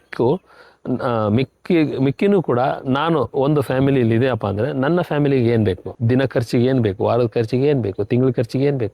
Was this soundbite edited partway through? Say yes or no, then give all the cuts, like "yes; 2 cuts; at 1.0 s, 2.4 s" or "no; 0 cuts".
yes; 1 cut; at 5.9 s